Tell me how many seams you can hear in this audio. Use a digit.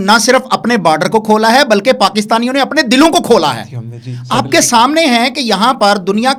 0